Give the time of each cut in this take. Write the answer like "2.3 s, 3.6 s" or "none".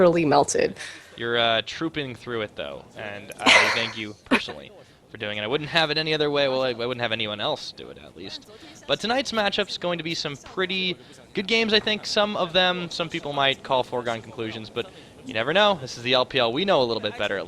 14.4 s